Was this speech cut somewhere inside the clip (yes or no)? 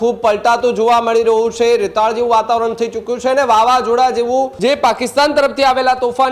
yes